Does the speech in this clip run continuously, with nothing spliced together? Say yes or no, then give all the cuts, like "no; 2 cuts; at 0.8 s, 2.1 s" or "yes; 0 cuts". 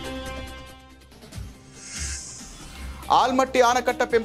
yes; 0 cuts